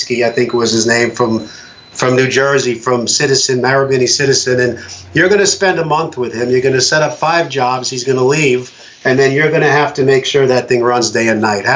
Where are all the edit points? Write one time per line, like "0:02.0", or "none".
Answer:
none